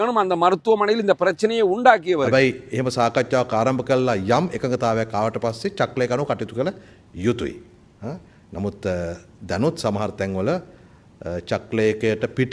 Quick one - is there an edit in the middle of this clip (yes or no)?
yes